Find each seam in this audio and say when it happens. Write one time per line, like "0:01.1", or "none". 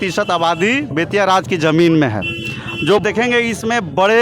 0:03.0